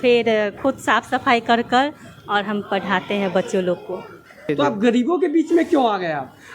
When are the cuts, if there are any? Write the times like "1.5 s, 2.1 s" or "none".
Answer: 4.5 s